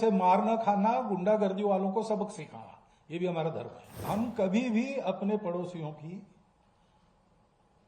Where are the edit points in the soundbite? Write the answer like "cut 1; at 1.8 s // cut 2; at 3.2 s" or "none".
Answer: cut 1; at 4.0 s